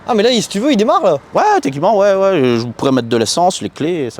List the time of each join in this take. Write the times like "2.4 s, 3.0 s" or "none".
none

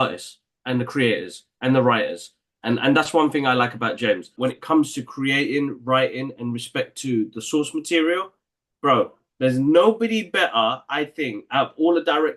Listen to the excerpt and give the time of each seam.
4.3 s

